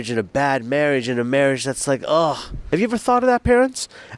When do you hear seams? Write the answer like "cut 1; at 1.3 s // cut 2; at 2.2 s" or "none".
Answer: cut 1; at 2.5 s